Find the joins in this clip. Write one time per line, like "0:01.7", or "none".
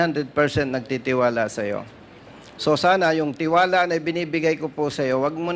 none